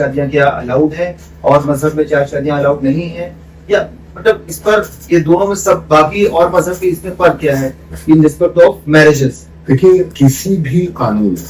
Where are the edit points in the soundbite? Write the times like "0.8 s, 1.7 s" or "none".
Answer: none